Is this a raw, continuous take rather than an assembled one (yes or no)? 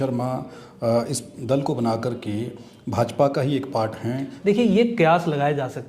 no